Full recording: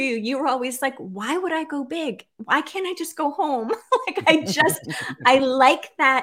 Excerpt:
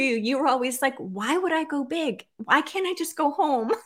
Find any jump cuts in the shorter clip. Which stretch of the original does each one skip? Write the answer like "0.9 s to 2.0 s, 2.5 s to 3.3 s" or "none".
none